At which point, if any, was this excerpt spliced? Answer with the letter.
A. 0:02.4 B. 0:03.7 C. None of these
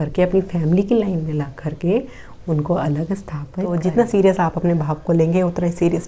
B